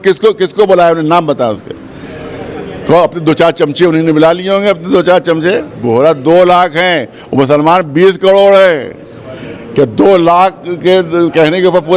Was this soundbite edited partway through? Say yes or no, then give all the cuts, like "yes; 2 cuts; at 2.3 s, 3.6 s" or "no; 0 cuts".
yes; 1 cut; at 5.7 s